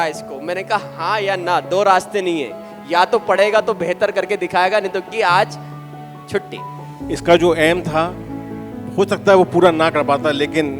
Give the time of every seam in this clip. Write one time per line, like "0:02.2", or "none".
0:07.0

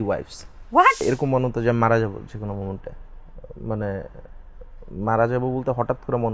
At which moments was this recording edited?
0:01.0

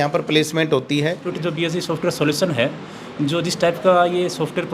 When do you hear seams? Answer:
0:01.3

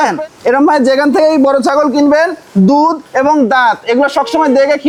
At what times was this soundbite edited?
none

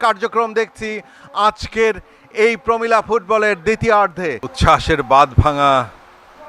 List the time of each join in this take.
0:04.5

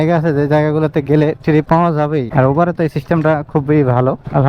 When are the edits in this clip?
none

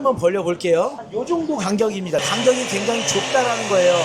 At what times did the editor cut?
0:01.0
0:02.2

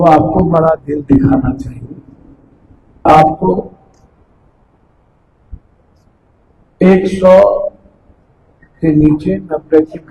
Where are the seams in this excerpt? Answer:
0:03.0

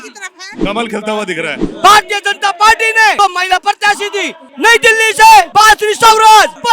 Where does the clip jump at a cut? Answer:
0:01.6
0:03.2

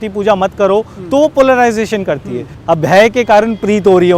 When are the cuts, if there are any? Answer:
0:02.5

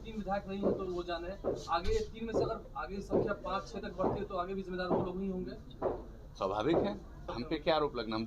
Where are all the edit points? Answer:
0:07.3

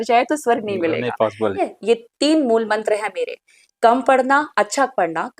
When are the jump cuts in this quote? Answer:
0:01.6

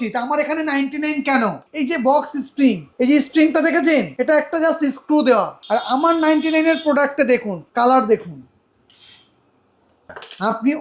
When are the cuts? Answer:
0:01.7
0:02.9
0:04.1
0:05.6
0:07.6
0:09.9

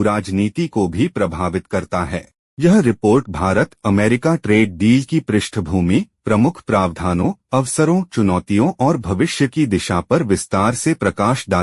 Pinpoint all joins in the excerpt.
0:02.4

